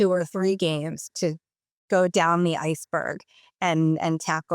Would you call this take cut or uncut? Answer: cut